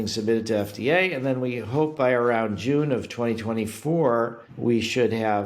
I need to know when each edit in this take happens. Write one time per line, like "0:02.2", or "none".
0:04.4